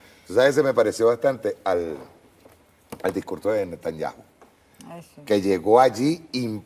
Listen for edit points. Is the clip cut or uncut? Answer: cut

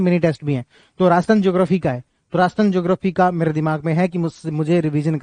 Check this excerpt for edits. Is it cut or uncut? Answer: uncut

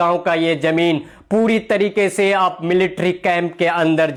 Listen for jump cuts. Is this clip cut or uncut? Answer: uncut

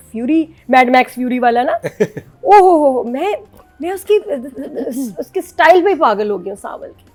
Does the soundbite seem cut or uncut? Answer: uncut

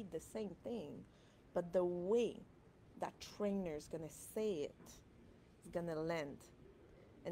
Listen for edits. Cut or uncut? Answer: uncut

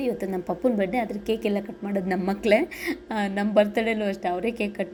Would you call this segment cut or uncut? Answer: uncut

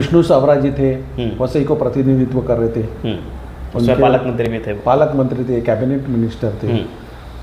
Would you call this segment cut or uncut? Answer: uncut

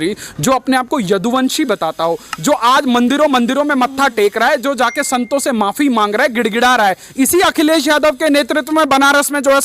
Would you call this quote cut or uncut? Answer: uncut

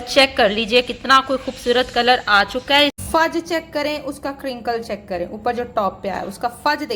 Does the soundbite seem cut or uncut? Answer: cut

